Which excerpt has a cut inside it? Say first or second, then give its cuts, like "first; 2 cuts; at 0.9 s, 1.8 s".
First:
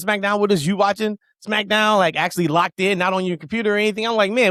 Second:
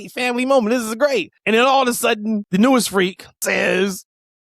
second; 3 cuts; at 1.3 s, 2.4 s, 3.4 s